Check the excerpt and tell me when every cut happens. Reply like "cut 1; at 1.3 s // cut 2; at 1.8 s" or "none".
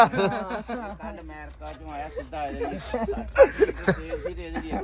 none